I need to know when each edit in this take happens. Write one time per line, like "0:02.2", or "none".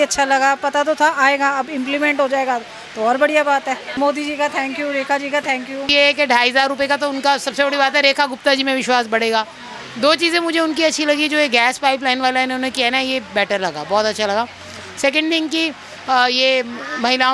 0:03.9
0:05.9